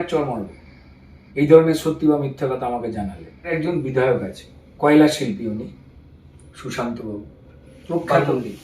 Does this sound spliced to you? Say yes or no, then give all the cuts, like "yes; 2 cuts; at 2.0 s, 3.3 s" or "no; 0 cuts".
yes; 1 cut; at 3.5 s